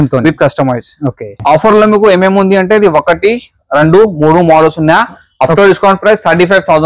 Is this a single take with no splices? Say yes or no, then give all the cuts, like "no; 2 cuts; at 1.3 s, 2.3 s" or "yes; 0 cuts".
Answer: no; 1 cut; at 1.4 s